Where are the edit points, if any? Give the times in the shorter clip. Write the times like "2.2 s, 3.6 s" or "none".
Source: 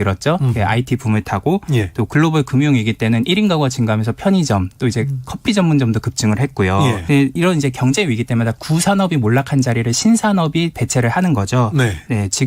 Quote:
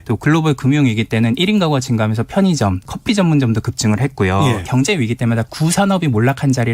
2.8 s, 4.6 s